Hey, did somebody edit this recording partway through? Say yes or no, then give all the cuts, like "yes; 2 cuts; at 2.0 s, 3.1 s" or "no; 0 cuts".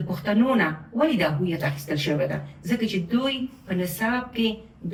no; 0 cuts